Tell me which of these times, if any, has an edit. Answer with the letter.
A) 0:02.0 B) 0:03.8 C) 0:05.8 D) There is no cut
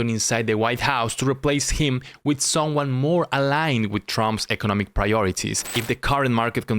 C